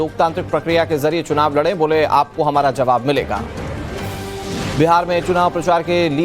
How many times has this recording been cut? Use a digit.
1